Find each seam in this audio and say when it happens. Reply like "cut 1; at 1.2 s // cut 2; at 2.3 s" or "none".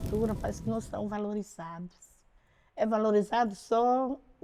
none